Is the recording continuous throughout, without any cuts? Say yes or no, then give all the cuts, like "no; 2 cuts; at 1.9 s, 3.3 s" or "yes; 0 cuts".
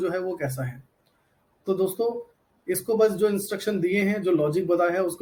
yes; 0 cuts